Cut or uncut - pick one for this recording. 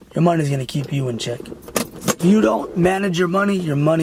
uncut